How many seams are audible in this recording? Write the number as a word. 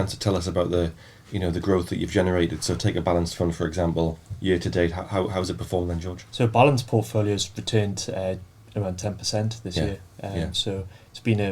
zero